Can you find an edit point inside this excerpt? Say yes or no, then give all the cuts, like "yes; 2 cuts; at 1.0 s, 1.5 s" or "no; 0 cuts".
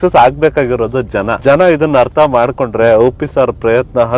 yes; 1 cut; at 1.3 s